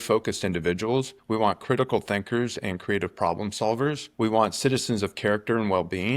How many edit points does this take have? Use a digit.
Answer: 2